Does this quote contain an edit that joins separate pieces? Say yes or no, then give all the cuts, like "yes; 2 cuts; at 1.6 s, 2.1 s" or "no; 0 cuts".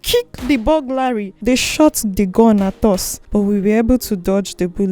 yes; 2 cuts; at 1.3 s, 3.1 s